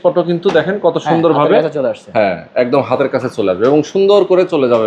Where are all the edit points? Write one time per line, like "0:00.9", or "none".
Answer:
none